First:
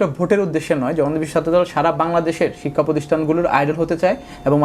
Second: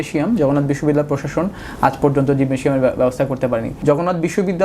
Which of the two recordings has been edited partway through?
second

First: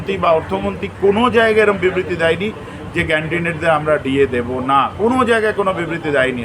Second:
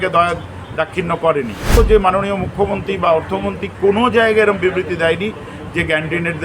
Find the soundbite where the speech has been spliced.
second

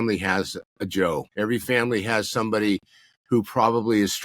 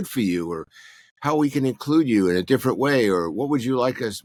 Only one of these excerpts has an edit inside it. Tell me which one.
first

